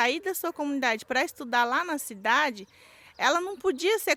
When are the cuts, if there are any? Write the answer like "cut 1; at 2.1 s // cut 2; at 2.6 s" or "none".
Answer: none

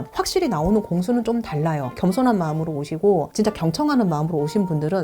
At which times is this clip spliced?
cut 1; at 2.0 s

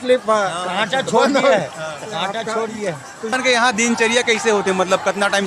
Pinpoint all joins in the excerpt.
cut 1; at 3.3 s

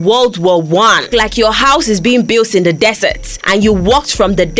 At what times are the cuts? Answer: cut 1; at 1.1 s

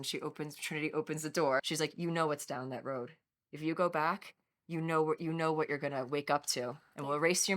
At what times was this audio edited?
cut 1; at 1.6 s

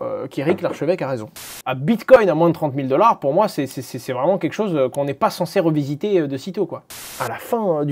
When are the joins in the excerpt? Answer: cut 1; at 1.6 s // cut 2; at 6.8 s

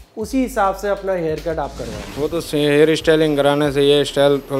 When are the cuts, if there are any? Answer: cut 1; at 2.0 s

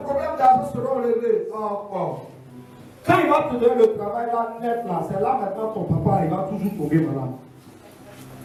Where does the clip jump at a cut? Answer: none

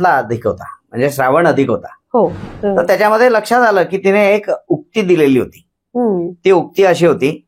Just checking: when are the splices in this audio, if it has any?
cut 1; at 2.5 s

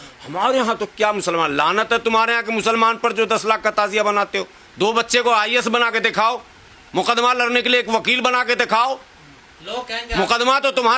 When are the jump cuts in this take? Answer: none

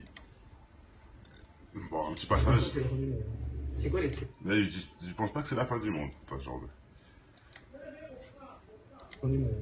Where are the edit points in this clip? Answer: cut 1; at 8.2 s

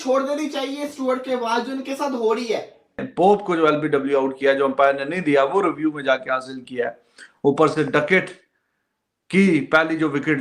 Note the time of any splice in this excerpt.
cut 1; at 3.1 s

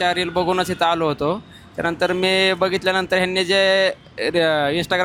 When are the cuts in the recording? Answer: none

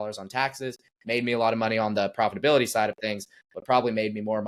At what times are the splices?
none

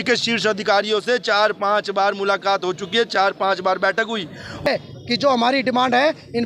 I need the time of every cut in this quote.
cut 1; at 4.7 s

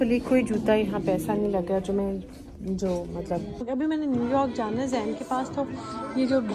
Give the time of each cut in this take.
cut 1; at 3.7 s

